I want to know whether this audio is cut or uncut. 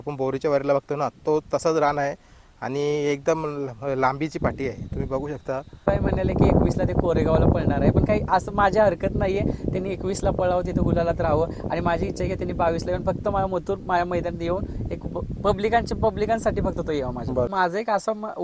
cut